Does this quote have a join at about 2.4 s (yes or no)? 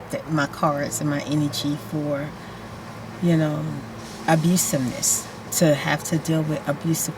no